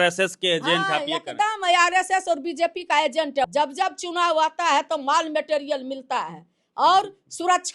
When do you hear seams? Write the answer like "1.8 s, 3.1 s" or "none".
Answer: 3.5 s